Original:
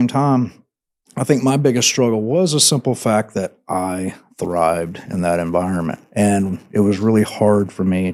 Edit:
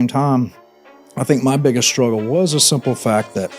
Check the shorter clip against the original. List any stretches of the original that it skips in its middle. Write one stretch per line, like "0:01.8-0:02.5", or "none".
none